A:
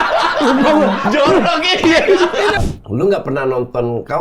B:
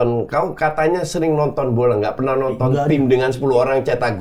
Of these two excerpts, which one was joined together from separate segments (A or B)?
A